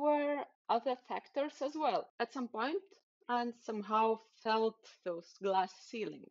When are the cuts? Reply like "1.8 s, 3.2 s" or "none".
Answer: 2.1 s